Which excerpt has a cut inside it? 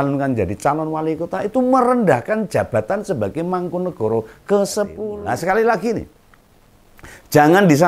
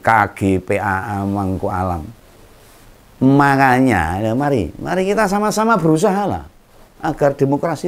first; 1 cut; at 5.1 s

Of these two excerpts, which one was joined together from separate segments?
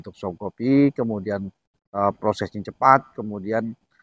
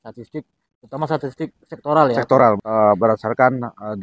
second; 1 cut; at 2.6 s

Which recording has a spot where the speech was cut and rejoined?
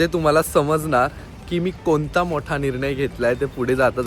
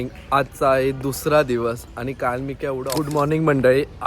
second; 1 cut; at 2.9 s

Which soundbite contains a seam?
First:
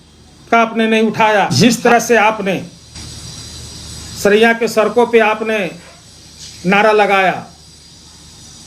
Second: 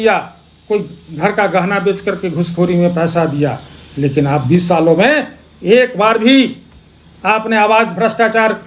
first; 2 cuts; at 1.5 s, 2.9 s

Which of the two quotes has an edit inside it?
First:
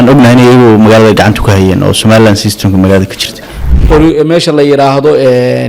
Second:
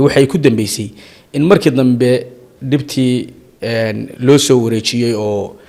first; 1 cut; at 3.5 s

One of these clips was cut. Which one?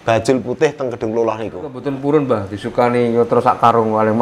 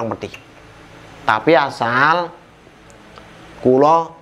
first; 1 cut; at 1.8 s

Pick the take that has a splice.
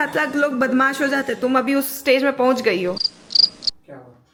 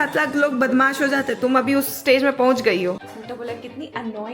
second; 1 cut; at 3.1 s

